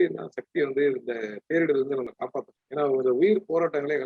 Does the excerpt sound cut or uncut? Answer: cut